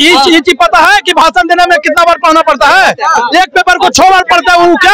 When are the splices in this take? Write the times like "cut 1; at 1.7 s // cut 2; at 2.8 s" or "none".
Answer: none